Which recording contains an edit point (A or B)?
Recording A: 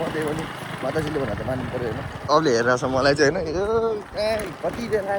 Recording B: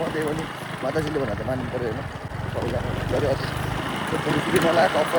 A